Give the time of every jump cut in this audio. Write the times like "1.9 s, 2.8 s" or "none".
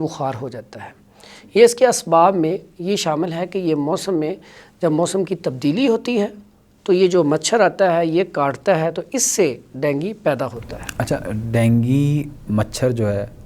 none